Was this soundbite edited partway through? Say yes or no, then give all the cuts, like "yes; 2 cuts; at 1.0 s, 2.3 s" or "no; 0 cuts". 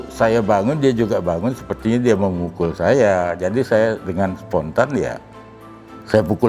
no; 0 cuts